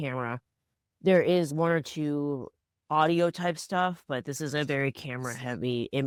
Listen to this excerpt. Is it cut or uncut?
uncut